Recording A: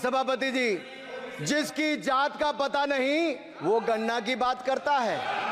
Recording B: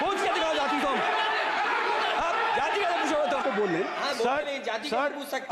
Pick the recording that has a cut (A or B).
B